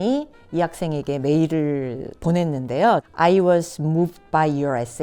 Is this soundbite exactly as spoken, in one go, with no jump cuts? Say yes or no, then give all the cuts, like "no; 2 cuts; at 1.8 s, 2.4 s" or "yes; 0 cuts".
no; 1 cut; at 3.1 s